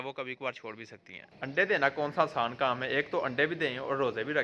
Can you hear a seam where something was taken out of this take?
no; 0 cuts

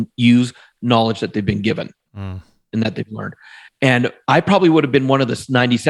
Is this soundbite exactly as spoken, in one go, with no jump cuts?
yes; 0 cuts

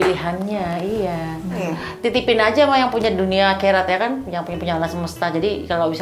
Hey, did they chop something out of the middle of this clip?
yes; 1 cut; at 1.8 s

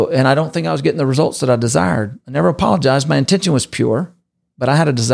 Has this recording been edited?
yes; 1 cut; at 2.2 s

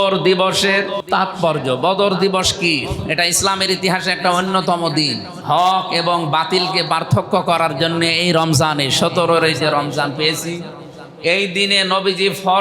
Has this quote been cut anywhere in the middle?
yes; 1 cut; at 1.0 s

